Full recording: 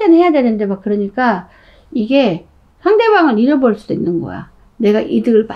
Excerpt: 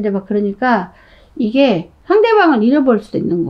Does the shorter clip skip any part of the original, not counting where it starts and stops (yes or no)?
yes